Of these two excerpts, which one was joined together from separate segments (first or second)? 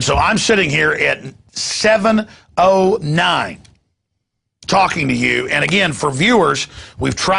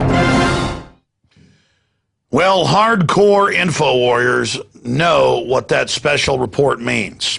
first